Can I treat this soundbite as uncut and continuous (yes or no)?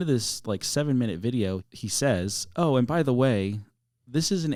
yes